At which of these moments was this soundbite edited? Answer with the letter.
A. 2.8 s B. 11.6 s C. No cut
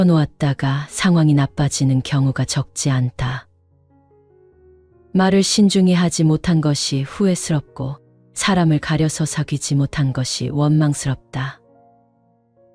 B